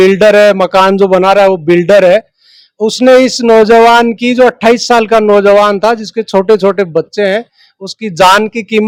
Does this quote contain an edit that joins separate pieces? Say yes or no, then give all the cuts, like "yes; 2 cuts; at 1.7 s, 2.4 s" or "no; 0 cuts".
no; 0 cuts